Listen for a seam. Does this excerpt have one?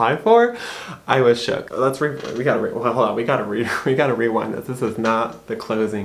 yes; 1 cut; at 1.7 s

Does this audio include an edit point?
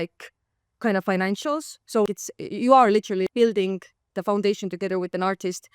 yes; 2 cuts; at 2.1 s, 3.3 s

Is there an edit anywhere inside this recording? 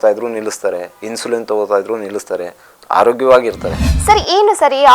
yes; 1 cut; at 3.9 s

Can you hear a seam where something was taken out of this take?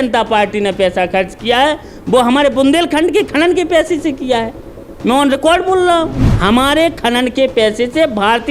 yes; 1 cut; at 6.2 s

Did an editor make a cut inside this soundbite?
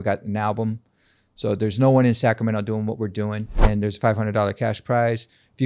yes; 1 cut; at 3.6 s

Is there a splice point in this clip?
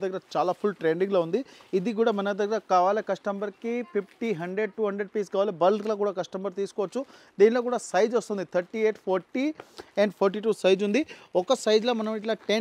no; 0 cuts

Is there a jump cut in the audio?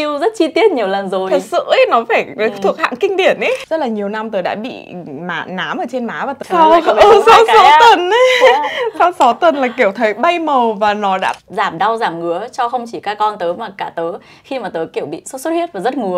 yes; 3 cuts; at 3.6 s, 6.4 s, 11.4 s

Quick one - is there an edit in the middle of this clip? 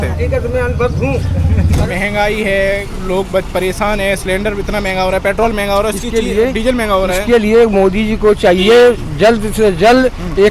yes; 1 cut; at 1.8 s

